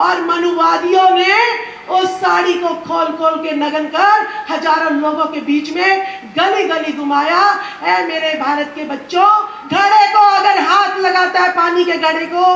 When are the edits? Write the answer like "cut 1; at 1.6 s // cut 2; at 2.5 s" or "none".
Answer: cut 1; at 9.6 s